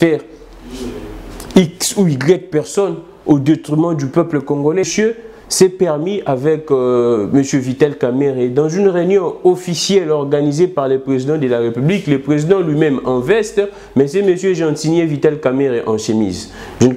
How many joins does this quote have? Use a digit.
1